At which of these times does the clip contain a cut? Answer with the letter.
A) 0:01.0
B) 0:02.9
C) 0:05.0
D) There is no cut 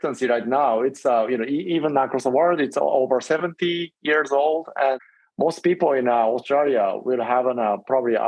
C